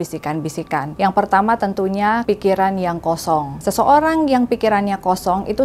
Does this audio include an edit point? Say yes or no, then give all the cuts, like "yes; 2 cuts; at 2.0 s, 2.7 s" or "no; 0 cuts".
yes; 3 cuts; at 0.9 s, 2.2 s, 3.5 s